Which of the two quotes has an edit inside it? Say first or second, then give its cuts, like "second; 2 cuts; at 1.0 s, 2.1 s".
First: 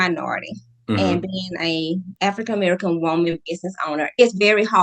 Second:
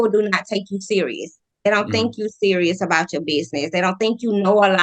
first; 1 cut; at 2.1 s